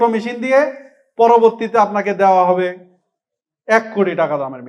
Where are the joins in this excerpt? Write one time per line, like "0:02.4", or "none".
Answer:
none